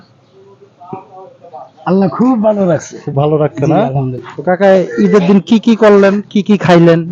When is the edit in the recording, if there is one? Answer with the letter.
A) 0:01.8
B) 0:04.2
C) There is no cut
B